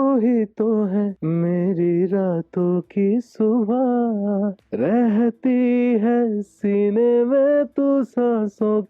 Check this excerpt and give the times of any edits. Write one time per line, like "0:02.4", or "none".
0:01.2
0:04.6